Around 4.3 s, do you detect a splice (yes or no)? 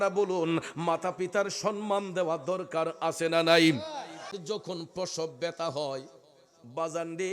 yes